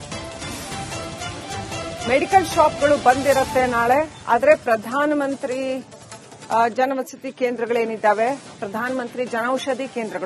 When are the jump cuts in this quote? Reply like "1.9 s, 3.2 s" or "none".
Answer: 2.0 s